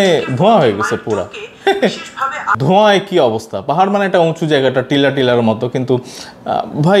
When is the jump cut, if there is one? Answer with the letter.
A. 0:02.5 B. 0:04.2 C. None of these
A